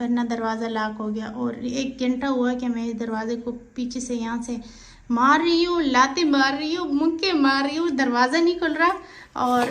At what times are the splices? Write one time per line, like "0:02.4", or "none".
none